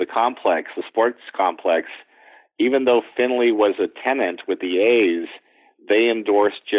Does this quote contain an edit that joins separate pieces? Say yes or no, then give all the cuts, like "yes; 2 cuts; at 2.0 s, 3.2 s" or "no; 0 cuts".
no; 0 cuts